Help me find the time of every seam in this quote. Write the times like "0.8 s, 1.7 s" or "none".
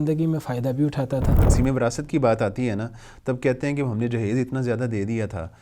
1.5 s